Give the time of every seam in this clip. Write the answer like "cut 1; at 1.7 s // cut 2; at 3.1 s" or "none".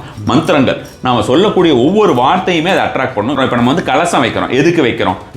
cut 1; at 3.4 s